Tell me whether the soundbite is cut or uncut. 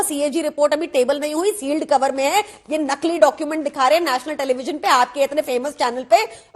uncut